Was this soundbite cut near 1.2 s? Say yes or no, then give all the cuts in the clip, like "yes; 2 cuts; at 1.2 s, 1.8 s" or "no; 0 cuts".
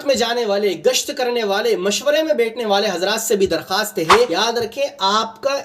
no; 1 cut; at 4.3 s